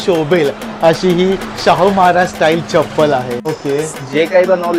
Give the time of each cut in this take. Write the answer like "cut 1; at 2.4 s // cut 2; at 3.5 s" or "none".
cut 1; at 3.4 s